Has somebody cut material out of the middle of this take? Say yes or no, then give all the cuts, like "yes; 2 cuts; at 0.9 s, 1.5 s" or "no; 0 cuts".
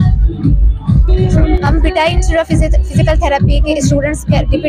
no; 0 cuts